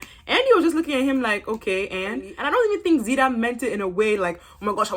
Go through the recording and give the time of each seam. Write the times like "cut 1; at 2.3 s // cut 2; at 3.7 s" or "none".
cut 1; at 2.3 s